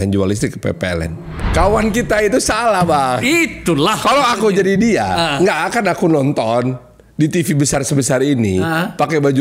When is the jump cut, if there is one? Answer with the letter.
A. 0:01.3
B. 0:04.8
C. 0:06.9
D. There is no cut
A